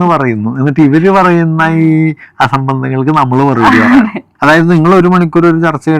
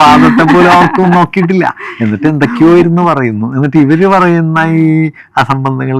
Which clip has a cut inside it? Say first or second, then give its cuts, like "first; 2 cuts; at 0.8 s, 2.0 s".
first; 1 cut; at 4.2 s